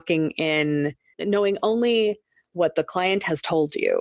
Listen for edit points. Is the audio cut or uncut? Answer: cut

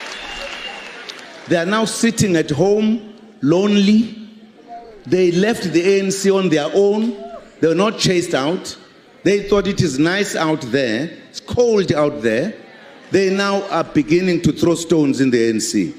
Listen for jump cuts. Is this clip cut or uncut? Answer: cut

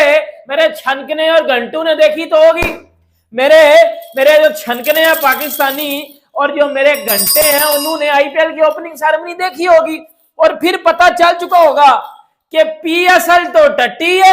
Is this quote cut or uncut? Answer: uncut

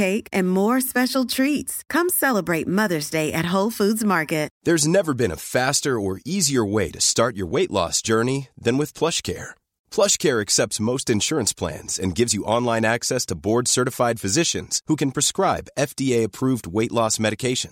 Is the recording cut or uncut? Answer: cut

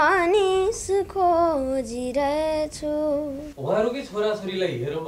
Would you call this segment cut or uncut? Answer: cut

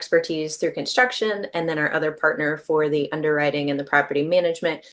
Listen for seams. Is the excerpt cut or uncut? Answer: uncut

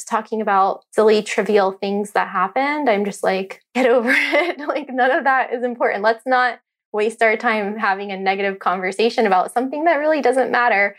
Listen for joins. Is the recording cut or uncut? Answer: uncut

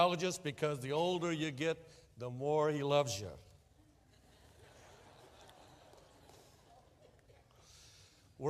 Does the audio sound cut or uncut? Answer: cut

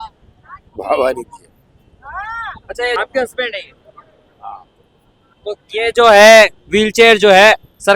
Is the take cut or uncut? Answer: cut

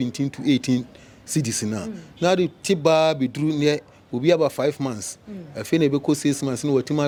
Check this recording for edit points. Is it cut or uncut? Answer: uncut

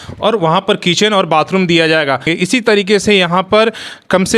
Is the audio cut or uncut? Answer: cut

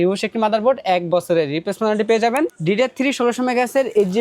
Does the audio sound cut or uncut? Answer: cut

